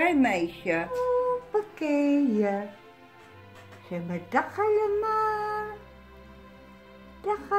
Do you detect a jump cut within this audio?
yes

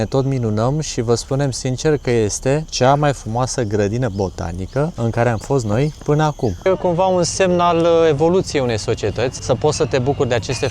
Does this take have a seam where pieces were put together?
yes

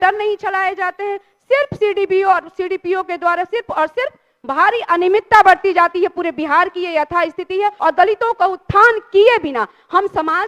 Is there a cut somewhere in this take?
yes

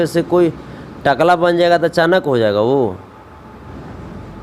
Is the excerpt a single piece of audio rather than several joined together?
yes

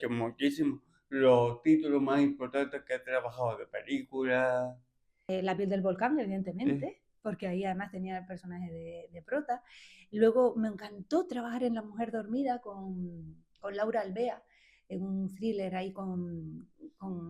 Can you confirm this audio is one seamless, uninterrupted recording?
no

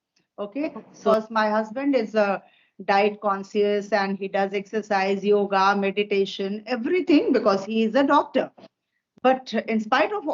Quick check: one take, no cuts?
no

